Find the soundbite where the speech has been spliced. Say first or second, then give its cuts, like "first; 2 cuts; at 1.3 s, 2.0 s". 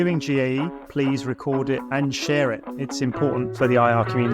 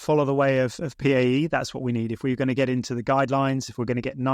first; 2 cuts; at 1.9 s, 3.5 s